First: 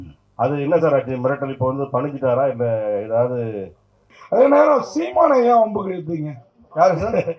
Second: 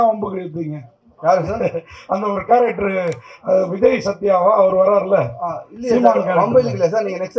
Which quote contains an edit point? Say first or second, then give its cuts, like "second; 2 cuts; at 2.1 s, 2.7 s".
first; 1 cut; at 4.1 s